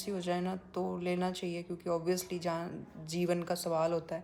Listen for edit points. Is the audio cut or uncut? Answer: uncut